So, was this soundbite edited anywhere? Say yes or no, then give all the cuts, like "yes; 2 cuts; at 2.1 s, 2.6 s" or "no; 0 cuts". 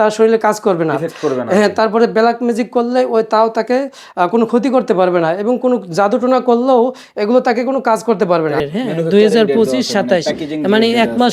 yes; 1 cut; at 8.7 s